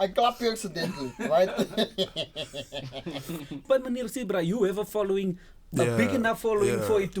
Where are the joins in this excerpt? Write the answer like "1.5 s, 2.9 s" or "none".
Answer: 3.6 s